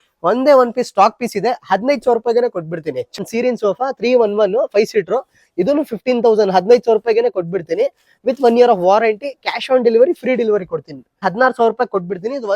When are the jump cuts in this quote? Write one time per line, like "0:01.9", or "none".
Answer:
0:03.2
0:11.2